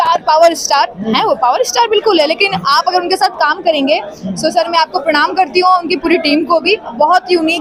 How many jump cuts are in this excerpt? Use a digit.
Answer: 0